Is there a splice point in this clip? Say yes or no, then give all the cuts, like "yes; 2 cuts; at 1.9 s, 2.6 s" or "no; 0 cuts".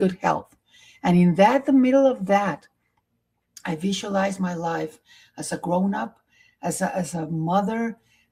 no; 0 cuts